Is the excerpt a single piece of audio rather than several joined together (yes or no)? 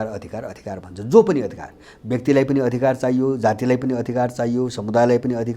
yes